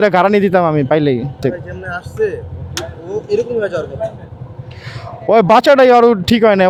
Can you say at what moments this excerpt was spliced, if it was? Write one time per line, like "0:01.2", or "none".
none